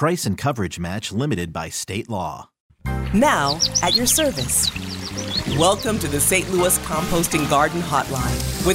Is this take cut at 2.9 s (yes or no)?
yes